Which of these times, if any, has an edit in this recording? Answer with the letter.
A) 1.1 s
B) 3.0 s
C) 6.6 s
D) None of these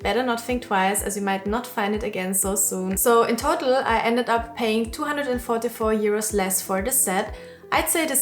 B